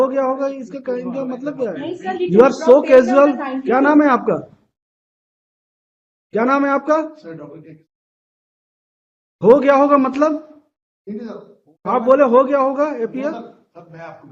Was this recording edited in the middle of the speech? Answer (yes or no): yes